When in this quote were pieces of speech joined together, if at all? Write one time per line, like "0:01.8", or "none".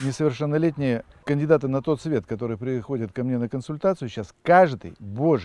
0:01.1